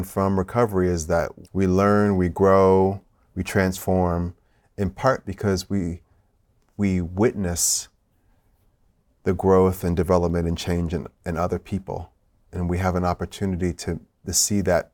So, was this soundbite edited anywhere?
yes; 1 cut; at 1.4 s

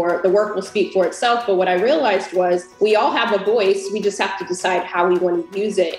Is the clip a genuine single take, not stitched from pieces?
no; 1 cut; at 2.7 s

